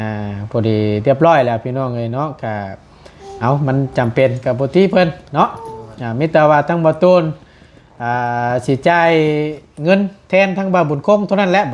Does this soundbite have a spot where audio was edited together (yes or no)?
no